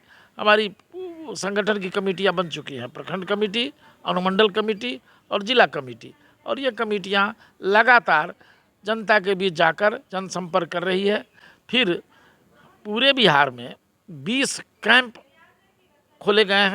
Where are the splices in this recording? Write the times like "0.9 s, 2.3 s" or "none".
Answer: none